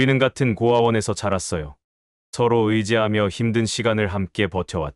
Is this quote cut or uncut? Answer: uncut